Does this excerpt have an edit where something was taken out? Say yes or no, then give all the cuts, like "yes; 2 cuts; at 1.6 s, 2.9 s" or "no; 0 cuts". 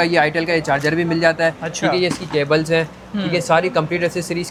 no; 0 cuts